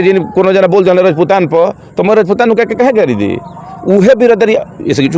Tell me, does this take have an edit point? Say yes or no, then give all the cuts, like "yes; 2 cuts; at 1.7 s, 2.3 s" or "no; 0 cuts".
no; 0 cuts